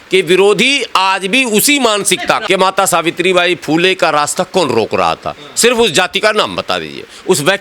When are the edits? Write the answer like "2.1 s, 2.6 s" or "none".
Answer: 2.4 s